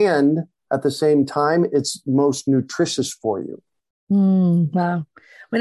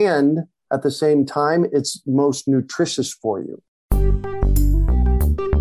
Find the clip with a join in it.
second; 1 cut; at 3.9 s

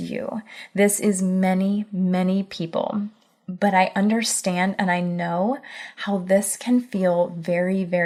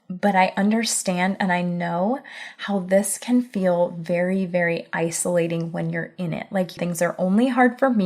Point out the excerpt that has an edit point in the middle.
second; 1 cut; at 6.7 s

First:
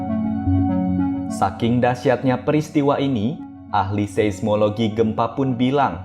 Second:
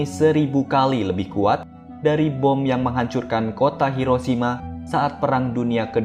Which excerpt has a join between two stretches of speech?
first; 1 cut; at 1.3 s

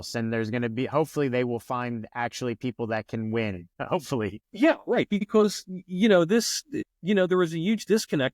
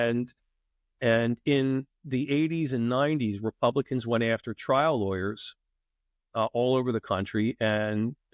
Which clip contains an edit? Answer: first; 3 cuts; at 4.1 s, 5.2 s, 6.6 s

